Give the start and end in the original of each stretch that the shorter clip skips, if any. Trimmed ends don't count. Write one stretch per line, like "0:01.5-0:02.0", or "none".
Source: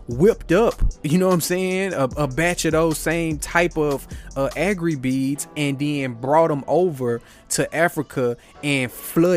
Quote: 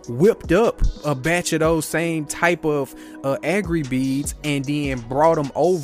0:01.0-0:02.1